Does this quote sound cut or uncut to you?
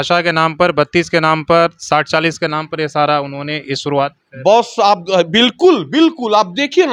uncut